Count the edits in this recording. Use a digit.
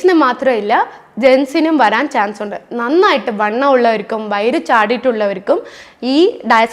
0